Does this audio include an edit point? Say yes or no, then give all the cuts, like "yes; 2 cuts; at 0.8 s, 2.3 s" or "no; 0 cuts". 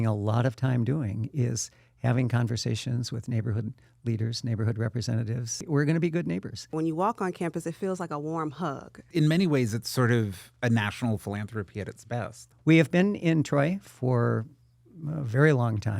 yes; 4 cuts; at 5.6 s, 6.7 s, 9.0 s, 12.5 s